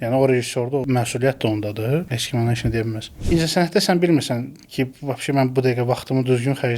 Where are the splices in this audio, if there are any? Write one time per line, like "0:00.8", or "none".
0:00.8
0:02.2
0:03.1